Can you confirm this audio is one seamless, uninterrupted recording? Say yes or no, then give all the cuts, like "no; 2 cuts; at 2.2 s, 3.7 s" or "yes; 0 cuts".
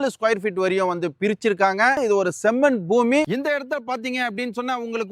yes; 0 cuts